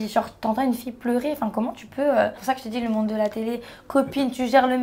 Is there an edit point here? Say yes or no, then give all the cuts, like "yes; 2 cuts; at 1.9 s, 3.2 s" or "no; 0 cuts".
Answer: yes; 1 cut; at 2.4 s